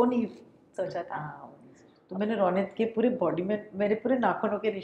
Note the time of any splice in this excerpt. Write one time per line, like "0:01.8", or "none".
0:01.9